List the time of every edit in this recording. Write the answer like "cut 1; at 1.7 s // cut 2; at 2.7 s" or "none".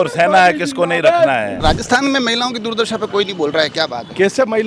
cut 1; at 1.6 s